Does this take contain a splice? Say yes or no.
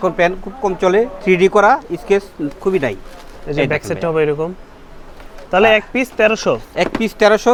no